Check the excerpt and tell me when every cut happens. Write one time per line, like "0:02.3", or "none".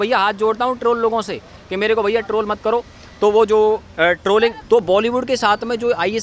0:04.6